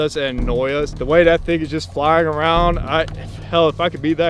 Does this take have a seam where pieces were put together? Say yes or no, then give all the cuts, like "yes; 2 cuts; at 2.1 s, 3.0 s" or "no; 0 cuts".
yes; 1 cut; at 0.9 s